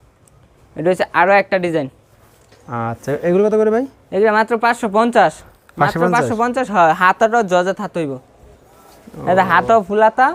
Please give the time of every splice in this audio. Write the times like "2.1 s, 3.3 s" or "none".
none